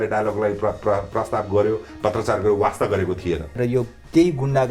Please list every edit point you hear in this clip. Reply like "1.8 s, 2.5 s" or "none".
3.5 s